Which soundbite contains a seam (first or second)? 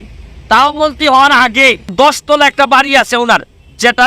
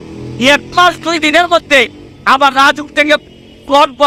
first